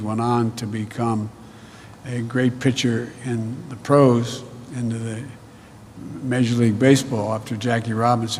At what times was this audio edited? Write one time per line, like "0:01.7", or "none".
none